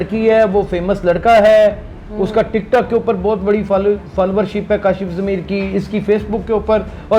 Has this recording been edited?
no; 0 cuts

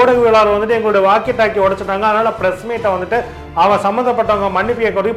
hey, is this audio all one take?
yes; 0 cuts

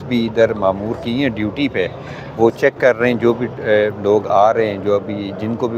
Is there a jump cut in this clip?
no; 0 cuts

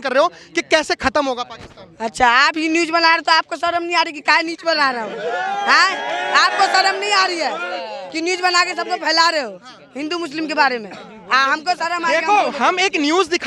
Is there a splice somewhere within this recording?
no; 0 cuts

